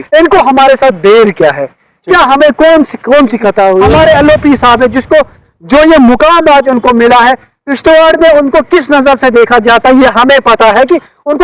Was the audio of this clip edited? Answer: yes; 1 cut; at 3.9 s

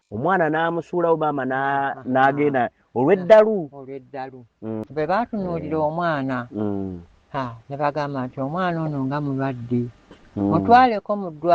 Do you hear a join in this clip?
yes; 1 cut; at 4.9 s

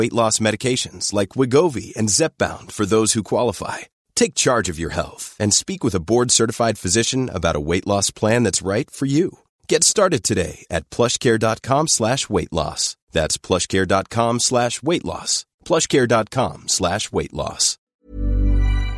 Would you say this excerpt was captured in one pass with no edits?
no; 1 cut; at 17.9 s

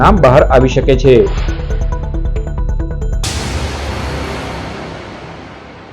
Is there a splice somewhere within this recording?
yes; 1 cut; at 3.1 s

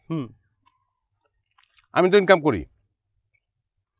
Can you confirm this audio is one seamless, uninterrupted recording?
yes; 0 cuts

